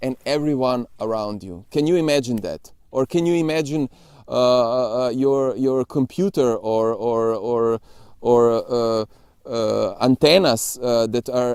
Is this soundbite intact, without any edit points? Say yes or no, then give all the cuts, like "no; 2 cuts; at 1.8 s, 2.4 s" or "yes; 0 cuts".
yes; 0 cuts